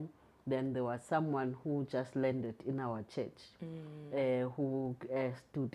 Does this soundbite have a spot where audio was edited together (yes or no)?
no